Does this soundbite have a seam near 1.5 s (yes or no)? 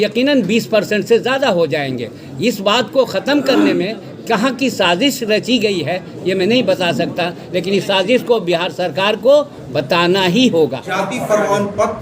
no